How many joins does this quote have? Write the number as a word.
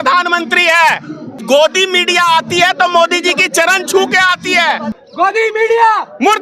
two